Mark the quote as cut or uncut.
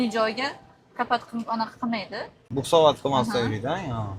uncut